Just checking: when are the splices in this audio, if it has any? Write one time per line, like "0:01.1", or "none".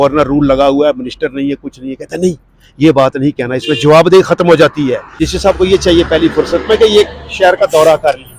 0:05.2